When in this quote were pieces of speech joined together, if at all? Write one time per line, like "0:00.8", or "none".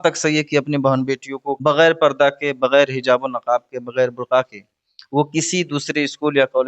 0:01.5